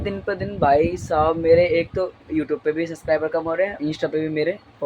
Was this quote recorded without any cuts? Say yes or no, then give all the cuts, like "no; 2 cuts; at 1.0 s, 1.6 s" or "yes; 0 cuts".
no; 1 cut; at 3.8 s